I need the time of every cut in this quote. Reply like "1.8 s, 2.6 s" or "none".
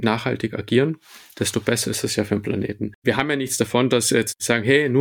2.9 s